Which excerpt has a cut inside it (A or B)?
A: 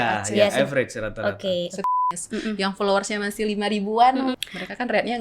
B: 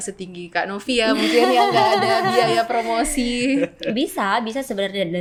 A